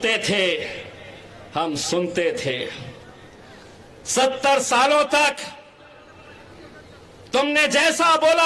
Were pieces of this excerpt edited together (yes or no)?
no